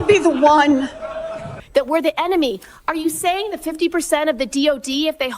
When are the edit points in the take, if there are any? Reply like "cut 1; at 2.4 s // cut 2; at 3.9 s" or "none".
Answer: cut 1; at 1.5 s